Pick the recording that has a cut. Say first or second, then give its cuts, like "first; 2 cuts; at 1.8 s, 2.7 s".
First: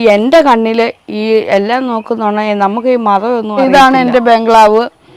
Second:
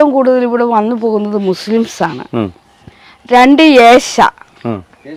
first; 1 cut; at 3.5 s